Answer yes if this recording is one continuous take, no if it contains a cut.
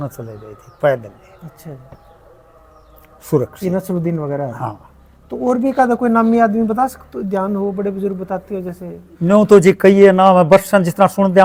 yes